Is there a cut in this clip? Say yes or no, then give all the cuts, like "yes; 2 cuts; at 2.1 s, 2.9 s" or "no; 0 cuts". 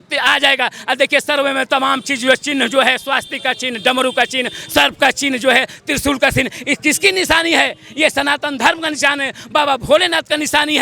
no; 0 cuts